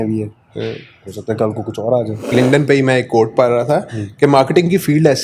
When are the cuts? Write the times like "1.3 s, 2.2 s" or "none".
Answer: 2.3 s